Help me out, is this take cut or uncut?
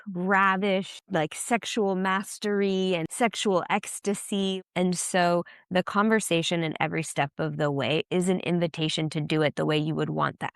cut